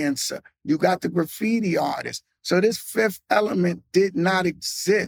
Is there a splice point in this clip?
no; 0 cuts

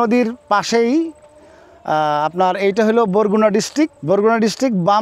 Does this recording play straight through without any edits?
no; 1 cut; at 4.0 s

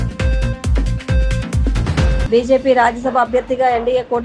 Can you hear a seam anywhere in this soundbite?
yes; 1 cut; at 2.1 s

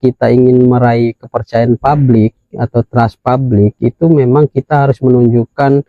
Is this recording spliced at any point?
no; 0 cuts

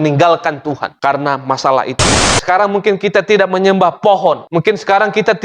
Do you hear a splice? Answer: yes; 1 cut; at 2.0 s

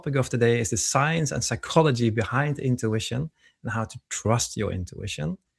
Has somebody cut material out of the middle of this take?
no; 0 cuts

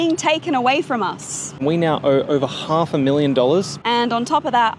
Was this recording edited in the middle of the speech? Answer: yes; 2 cuts; at 1.5 s, 3.8 s

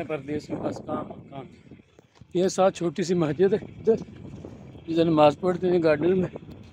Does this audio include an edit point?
no; 0 cuts

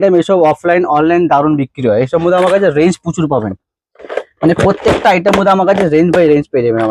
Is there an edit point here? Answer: no; 0 cuts

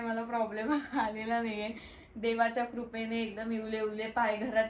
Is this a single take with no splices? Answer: yes; 0 cuts

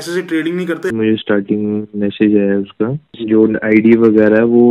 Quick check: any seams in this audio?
yes; 2 cuts; at 0.9 s, 3.1 s

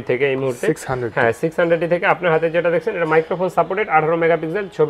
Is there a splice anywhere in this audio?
no; 0 cuts

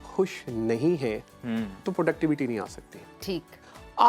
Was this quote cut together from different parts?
no; 0 cuts

